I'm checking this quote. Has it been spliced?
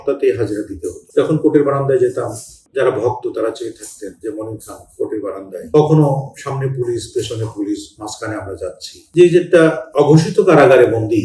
no; 0 cuts

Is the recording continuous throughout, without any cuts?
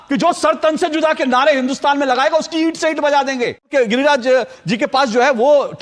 no; 1 cut; at 3.7 s

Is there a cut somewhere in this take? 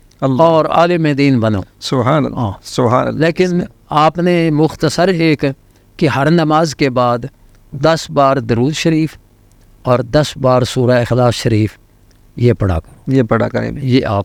no; 0 cuts

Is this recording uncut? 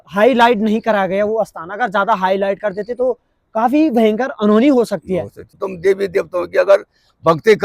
no; 1 cut; at 5.7 s

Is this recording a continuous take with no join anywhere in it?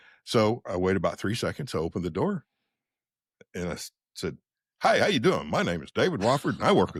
yes; 0 cuts

